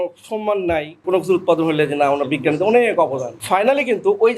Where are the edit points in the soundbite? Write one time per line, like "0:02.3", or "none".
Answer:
0:01.0
0:03.4